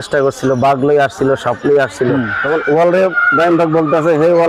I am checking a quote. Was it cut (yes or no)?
yes